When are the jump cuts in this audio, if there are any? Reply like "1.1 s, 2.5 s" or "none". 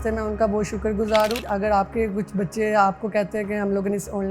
1.4 s

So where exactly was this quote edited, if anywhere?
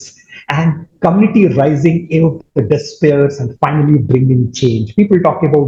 none

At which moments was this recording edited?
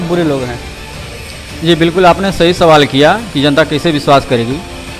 2.6 s

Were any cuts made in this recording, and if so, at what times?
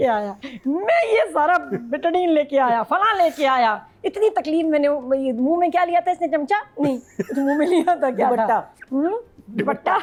none

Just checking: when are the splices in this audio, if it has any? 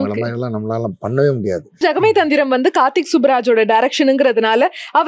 1.8 s

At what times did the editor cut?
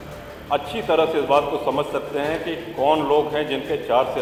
none

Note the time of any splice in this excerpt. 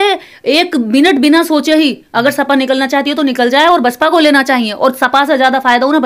none

